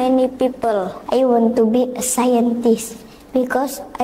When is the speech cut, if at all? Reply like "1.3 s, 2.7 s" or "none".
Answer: 0.9 s